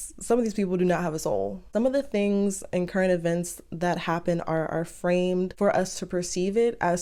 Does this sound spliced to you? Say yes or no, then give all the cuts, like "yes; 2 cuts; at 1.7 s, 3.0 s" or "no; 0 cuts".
no; 0 cuts